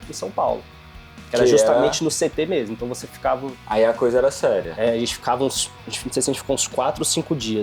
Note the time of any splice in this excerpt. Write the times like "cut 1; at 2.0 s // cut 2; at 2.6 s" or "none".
none